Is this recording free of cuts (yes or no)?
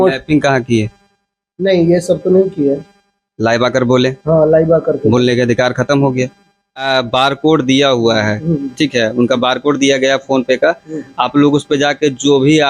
no